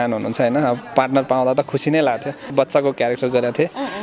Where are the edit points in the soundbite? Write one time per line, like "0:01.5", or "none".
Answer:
0:02.5